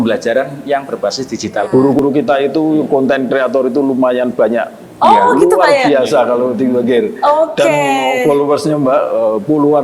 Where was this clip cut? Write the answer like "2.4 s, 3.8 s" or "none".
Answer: 1.7 s